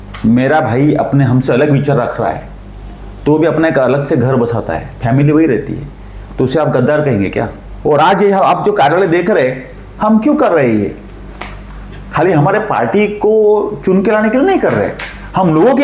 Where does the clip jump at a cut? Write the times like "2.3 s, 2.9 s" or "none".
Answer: 7.7 s